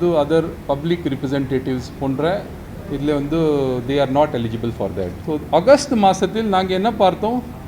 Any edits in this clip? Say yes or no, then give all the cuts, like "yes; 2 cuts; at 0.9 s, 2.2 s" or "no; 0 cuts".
yes; 1 cut; at 5.2 s